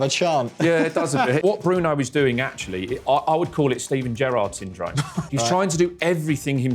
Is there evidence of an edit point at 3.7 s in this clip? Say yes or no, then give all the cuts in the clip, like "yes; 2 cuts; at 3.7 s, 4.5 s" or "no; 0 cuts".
no; 2 cuts; at 1.4 s, 5.2 s